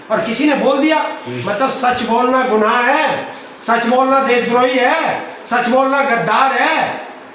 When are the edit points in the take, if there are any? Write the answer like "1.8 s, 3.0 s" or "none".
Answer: none